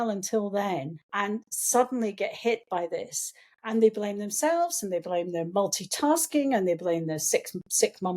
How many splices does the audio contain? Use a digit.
1